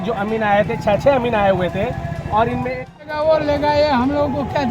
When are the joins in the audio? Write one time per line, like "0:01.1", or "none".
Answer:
0:03.0